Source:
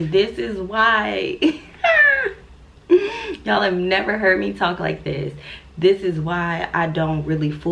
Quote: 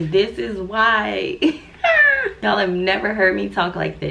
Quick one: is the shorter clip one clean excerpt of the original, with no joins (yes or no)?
no